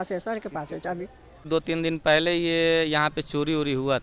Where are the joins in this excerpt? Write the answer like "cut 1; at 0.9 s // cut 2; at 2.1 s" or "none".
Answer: cut 1; at 1.5 s